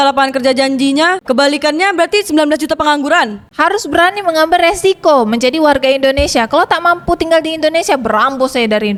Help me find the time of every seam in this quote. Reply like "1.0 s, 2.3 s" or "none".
none